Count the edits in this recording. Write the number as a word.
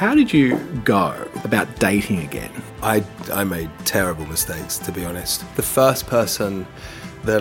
three